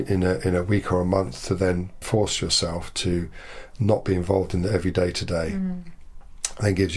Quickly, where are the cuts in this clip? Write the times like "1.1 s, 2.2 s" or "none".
2.0 s